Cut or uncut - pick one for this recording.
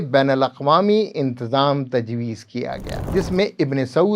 cut